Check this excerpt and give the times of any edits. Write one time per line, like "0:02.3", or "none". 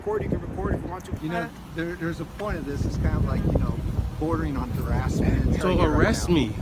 0:01.1
0:05.6